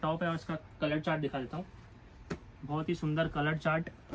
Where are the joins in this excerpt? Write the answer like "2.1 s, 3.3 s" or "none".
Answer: none